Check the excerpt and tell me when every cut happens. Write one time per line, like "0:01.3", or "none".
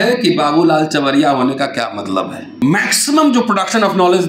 0:02.5

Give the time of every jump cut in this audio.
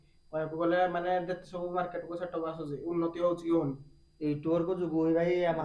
none

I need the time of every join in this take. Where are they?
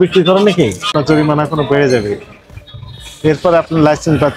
0:00.9

